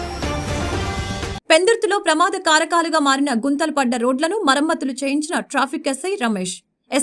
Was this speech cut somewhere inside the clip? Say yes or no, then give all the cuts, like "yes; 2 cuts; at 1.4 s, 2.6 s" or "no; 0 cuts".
no; 0 cuts